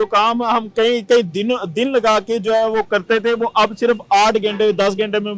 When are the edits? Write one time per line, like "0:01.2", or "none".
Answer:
none